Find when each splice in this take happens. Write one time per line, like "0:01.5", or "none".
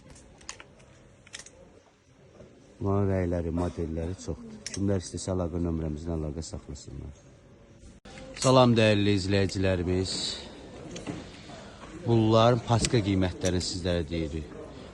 0:08.0

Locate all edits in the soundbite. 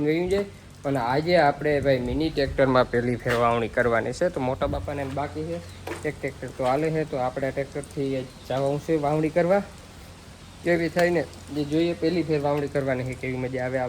none

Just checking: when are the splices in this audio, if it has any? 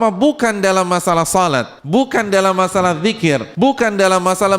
0:01.8
0:03.5

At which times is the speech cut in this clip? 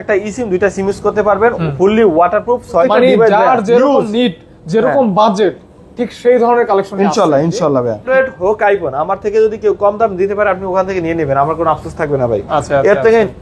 0:02.8
0:08.1

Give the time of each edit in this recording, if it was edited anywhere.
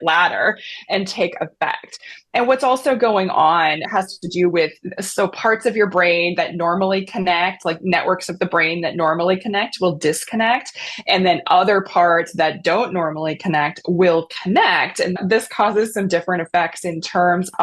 0:15.2

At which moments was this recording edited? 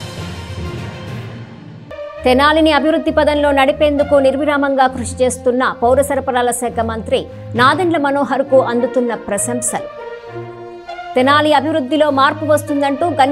0:01.8

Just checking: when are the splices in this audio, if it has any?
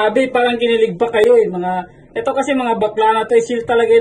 none

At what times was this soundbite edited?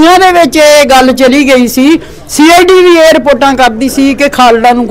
none

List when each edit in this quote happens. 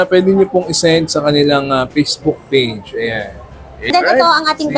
0:03.9

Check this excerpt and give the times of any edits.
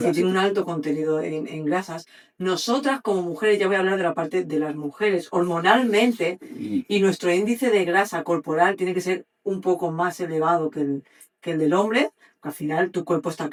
none

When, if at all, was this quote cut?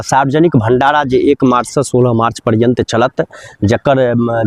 none

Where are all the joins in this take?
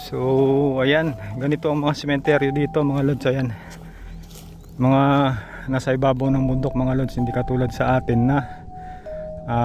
none

